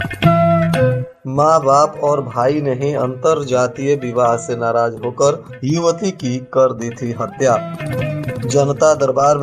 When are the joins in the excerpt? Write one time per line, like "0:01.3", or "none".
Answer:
0:01.1